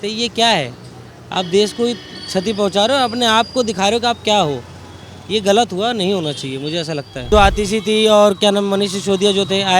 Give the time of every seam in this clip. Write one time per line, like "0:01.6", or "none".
0:07.3